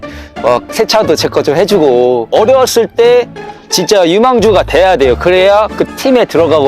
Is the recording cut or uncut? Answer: cut